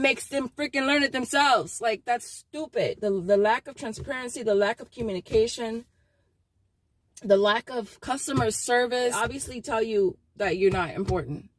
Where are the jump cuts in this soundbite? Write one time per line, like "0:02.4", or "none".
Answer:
0:03.0
0:09.1